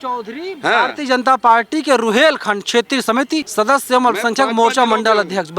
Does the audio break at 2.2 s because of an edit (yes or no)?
no